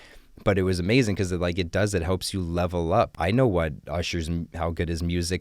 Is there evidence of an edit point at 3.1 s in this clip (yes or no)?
yes